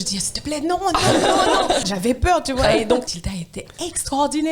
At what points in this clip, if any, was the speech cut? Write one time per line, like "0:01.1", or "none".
0:01.9
0:03.2

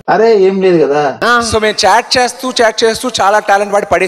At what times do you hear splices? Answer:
0:01.0

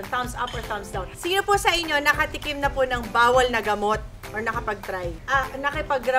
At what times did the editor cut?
0:01.1
0:05.2

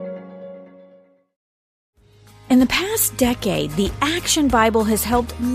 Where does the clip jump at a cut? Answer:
0:01.2

